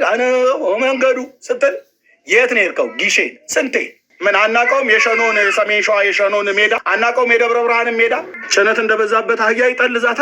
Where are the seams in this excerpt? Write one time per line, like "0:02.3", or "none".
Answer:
0:04.1
0:06.9
0:08.3